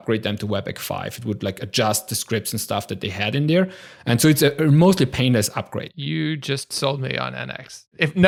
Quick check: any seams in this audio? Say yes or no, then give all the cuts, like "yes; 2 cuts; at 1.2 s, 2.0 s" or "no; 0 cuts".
no; 0 cuts